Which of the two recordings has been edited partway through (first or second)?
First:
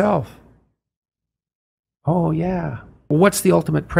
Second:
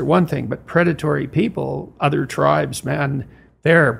first